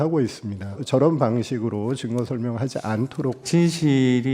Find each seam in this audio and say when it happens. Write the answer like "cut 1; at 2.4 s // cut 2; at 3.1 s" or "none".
cut 1; at 0.8 s // cut 2; at 3.4 s